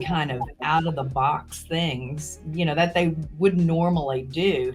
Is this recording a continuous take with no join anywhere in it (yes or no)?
yes